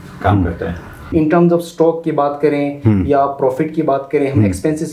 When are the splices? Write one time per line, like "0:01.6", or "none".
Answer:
0:01.1